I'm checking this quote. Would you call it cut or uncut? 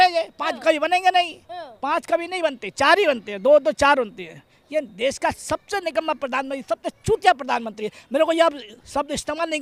uncut